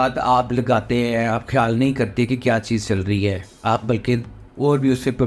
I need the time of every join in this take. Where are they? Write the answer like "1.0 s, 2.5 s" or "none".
none

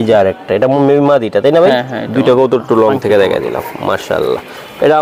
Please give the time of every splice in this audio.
none

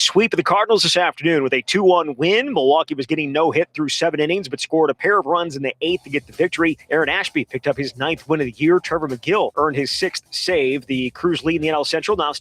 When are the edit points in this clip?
6.8 s, 9.5 s

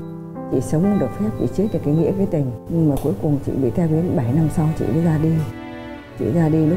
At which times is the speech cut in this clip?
none

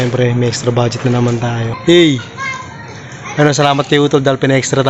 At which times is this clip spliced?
1.7 s

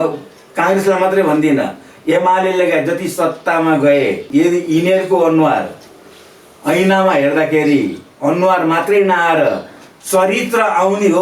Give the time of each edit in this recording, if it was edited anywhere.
4.2 s

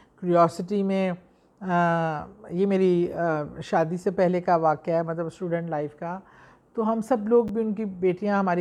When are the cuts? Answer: none

